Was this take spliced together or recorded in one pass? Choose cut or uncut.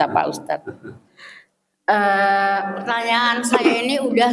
cut